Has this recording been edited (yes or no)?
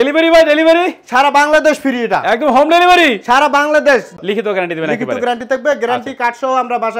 yes